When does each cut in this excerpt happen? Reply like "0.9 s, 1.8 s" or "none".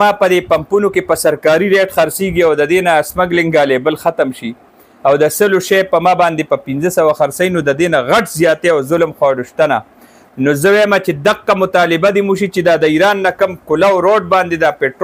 none